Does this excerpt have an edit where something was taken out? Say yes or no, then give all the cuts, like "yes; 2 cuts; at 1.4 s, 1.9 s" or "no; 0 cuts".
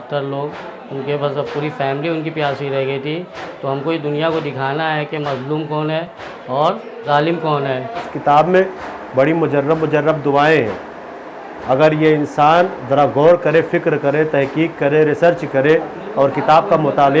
yes; 2 cuts; at 6.6 s, 8.1 s